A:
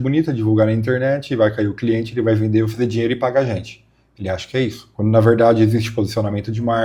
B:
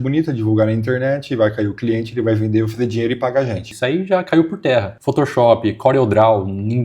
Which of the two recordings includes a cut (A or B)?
B